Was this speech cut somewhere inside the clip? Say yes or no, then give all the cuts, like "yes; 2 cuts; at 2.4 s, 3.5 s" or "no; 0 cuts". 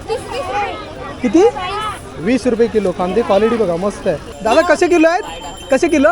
yes; 1 cut; at 4.3 s